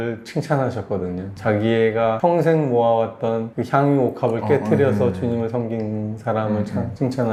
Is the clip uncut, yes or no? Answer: yes